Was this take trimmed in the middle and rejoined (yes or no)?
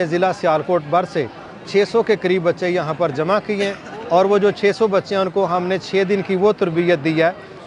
no